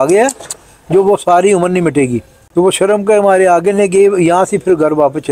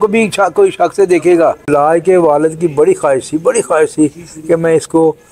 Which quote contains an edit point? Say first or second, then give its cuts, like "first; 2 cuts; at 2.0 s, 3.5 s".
second; 1 cut; at 1.6 s